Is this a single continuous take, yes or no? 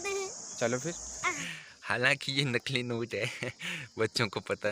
no